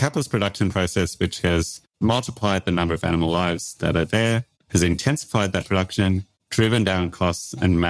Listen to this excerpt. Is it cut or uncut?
uncut